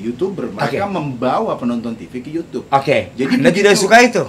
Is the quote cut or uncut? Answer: uncut